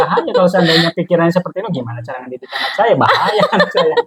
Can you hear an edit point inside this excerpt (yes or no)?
no